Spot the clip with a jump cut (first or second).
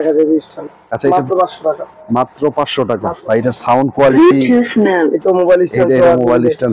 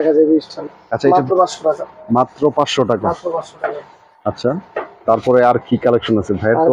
first